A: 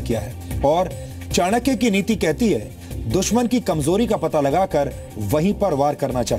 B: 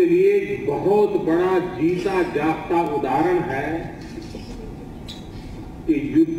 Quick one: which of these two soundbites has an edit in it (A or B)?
A